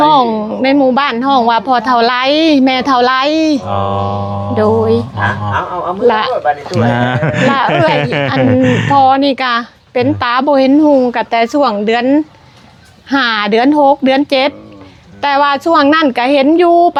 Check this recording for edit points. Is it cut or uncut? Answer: uncut